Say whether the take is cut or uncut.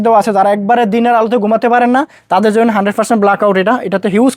uncut